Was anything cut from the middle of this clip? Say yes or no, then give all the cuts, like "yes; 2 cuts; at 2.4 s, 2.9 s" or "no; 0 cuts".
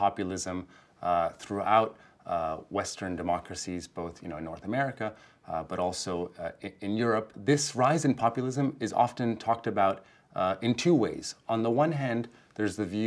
yes; 1 cut; at 7.4 s